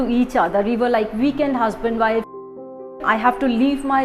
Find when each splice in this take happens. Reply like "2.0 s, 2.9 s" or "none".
2.9 s